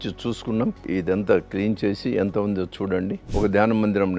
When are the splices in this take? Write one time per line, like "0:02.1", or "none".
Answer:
0:00.8
0:03.2